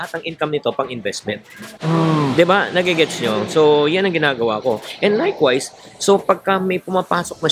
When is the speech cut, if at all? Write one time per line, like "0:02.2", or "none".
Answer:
none